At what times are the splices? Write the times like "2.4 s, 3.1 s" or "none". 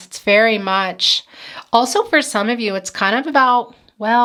none